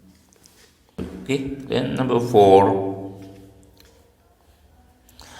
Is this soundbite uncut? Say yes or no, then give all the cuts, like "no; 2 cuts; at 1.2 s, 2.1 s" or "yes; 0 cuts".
no; 1 cut; at 1.0 s